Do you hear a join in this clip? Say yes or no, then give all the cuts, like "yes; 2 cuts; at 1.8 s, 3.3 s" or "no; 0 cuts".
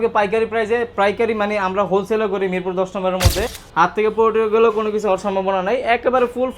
yes; 1 cut; at 3.6 s